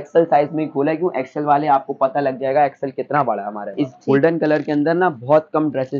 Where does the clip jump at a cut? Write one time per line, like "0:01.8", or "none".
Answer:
0:03.7